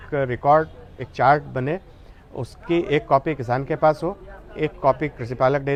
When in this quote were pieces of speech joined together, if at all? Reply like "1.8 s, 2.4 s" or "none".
none